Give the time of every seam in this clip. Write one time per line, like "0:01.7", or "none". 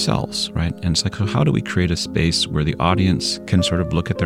0:03.3

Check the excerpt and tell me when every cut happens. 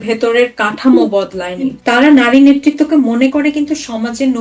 0:01.8

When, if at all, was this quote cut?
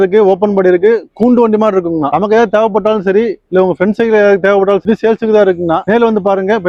none

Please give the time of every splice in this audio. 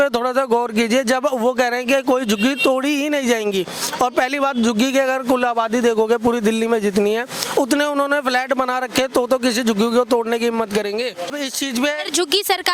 0:11.3

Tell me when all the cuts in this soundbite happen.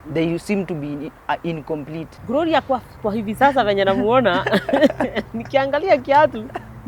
0:02.1

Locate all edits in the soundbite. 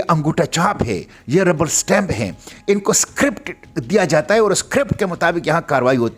none

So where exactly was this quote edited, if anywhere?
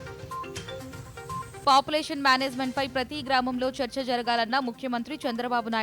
0:01.1

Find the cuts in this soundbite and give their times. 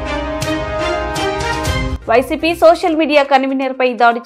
0:01.9

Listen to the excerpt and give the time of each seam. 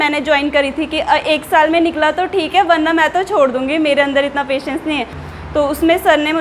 0:05.2

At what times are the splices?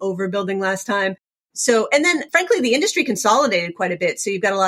0:01.5
0:02.3

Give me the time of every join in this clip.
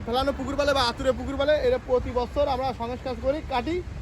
none

